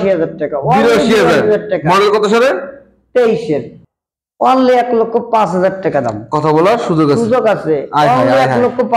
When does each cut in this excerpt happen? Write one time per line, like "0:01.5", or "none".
0:03.7